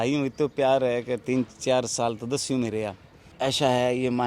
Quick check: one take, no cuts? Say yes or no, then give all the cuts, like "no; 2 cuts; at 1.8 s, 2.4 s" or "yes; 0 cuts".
no; 1 cut; at 3.2 s